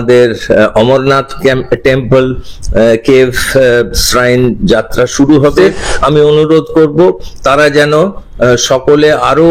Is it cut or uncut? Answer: cut